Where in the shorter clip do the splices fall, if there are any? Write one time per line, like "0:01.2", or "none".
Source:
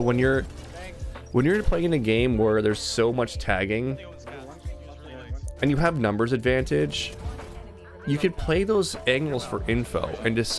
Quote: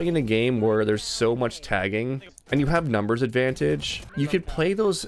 0:02.3
0:04.0